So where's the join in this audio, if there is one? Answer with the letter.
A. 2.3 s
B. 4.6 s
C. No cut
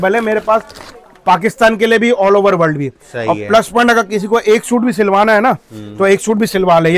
C